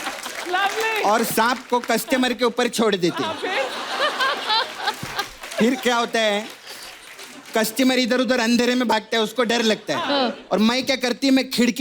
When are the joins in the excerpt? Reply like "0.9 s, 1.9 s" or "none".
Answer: none